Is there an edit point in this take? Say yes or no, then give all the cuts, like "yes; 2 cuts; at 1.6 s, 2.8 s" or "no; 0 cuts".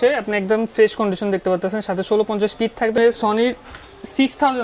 yes; 1 cut; at 2.9 s